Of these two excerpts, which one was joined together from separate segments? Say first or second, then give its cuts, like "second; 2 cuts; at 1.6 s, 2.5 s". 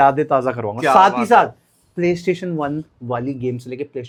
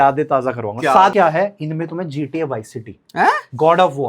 second; 1 cut; at 1.1 s